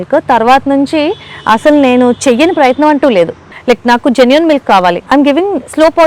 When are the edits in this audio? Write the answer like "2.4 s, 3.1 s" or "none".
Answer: 3.4 s, 5.0 s